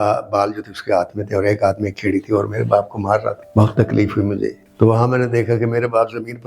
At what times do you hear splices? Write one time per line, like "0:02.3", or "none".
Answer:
0:03.4
0:04.6